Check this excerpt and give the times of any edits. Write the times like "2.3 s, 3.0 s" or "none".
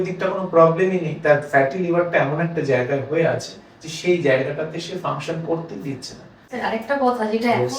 6.5 s